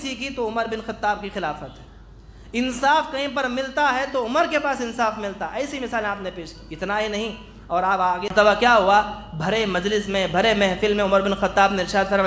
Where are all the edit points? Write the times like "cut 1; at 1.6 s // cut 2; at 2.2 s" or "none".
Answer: cut 1; at 8.3 s